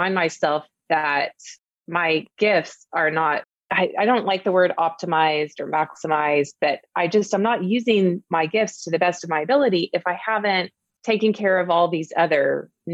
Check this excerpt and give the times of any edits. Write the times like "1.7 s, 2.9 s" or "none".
none